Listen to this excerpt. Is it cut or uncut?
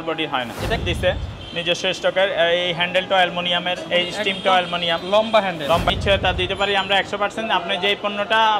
cut